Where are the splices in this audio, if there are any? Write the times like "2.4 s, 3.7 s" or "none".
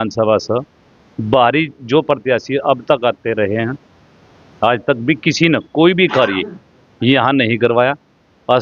none